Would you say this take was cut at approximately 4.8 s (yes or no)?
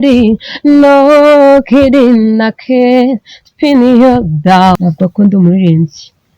yes